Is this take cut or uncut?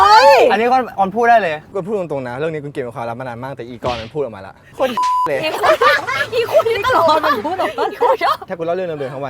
cut